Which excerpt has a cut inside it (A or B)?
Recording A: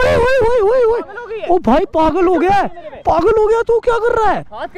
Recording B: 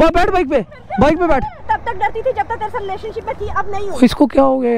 B